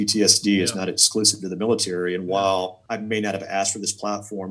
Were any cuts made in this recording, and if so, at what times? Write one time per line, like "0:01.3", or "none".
0:02.8